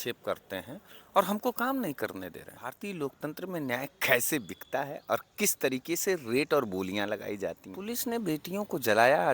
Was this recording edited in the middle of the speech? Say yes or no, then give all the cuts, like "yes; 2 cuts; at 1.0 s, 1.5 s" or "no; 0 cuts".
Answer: yes; 2 cuts; at 2.6 s, 7.7 s